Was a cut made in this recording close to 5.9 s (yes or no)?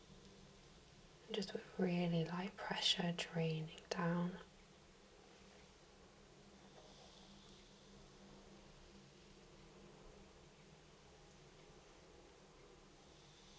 no